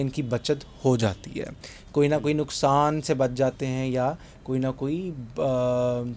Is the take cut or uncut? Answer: uncut